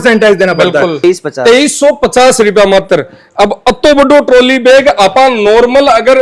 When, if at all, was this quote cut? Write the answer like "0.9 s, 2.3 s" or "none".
0.9 s